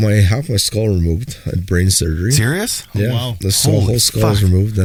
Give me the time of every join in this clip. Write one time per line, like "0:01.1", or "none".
none